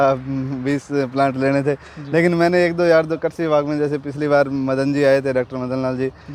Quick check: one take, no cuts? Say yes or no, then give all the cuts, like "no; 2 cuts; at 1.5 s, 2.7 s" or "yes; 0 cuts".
yes; 0 cuts